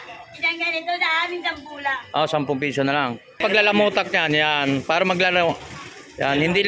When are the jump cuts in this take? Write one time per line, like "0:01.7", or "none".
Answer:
0:03.4